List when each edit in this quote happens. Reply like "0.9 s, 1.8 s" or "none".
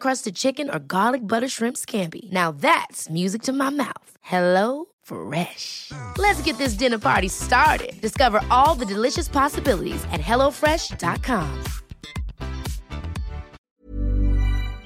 13.8 s

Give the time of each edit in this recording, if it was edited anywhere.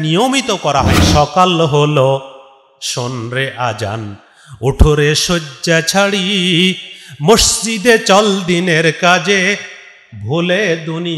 1.0 s

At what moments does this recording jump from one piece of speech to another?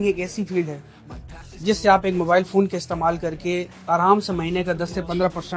none

